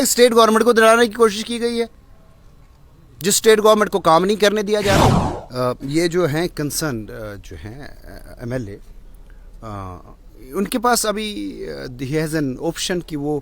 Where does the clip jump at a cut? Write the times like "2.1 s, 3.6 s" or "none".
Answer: 5.0 s